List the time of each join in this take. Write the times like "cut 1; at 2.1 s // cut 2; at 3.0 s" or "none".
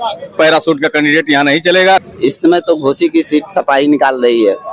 cut 1; at 2.0 s